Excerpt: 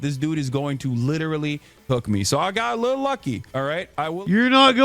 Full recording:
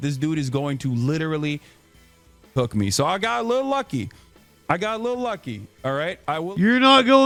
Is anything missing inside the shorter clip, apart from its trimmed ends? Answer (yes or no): yes